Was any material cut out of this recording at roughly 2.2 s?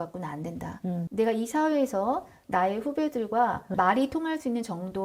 no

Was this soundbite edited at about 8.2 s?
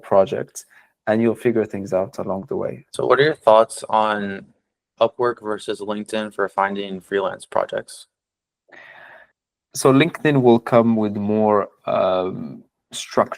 no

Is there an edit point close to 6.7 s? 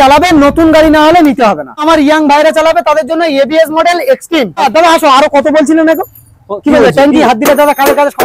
no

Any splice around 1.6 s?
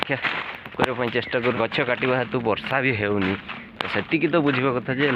yes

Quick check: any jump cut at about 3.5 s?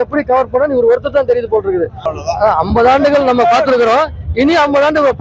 no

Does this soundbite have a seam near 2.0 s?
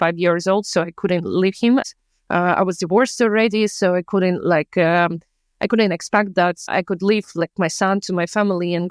no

